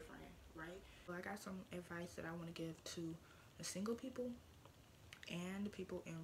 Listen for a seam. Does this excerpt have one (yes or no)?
yes